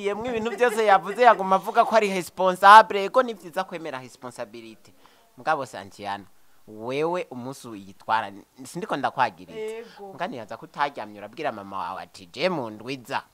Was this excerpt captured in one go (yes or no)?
yes